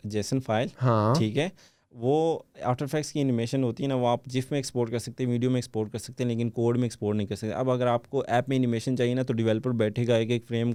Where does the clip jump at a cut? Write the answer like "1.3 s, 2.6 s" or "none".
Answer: none